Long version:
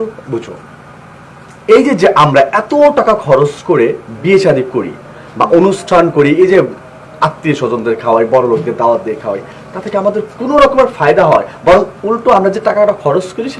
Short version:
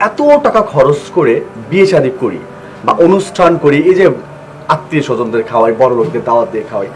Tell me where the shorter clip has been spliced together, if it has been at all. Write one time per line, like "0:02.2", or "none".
none